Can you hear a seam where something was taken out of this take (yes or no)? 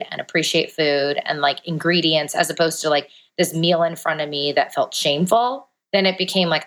yes